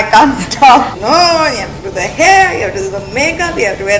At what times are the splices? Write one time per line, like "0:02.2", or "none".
0:00.9